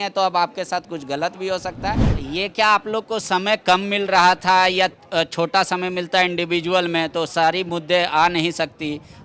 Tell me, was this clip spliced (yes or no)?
yes